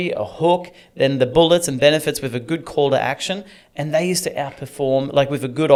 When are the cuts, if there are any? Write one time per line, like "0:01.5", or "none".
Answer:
none

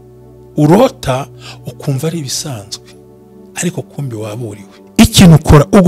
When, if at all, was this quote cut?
0:04.8

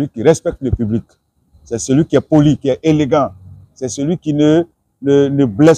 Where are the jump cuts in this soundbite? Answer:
none

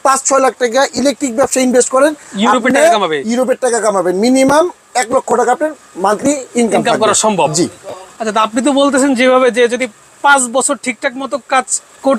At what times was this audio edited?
none

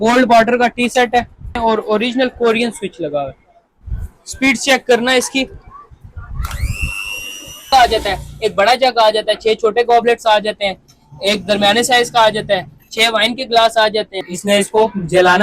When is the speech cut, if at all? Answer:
0:01.6
0:07.7
0:14.3

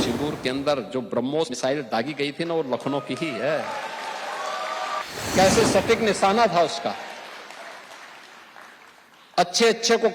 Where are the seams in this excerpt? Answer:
0:01.5
0:05.0

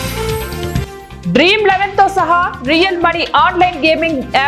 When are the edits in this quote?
0:00.9

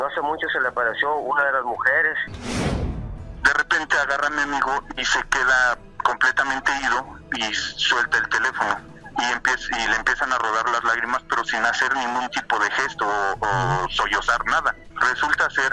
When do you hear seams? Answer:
0:02.8
0:05.9
0:08.9
0:14.9

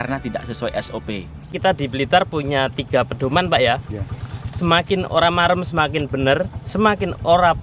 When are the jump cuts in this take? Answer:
0:01.6

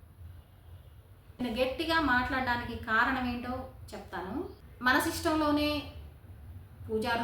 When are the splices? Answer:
0:01.4
0:04.6

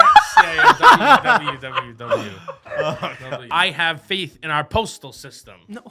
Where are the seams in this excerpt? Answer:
0:03.4

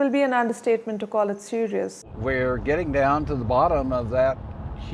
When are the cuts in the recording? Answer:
0:02.0

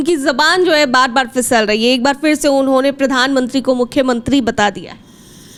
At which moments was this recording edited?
none

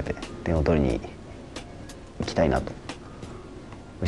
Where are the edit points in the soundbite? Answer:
none

